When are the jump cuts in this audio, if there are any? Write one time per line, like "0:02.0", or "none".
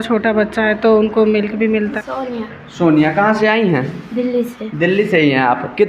0:01.9